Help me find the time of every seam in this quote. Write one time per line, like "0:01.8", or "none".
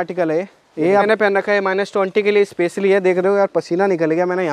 0:01.1